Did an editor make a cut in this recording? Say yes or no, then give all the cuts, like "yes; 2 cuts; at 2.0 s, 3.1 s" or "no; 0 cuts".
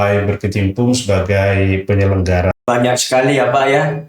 yes; 1 cut; at 2.5 s